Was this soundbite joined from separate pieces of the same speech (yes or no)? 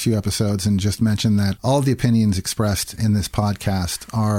yes